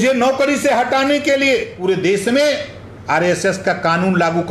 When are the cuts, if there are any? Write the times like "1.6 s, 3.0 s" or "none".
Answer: 1.8 s